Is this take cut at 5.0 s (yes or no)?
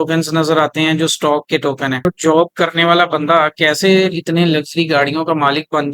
no